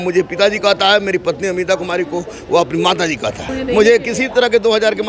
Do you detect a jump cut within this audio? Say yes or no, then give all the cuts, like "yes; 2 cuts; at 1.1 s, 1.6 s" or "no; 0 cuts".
yes; 1 cut; at 3.5 s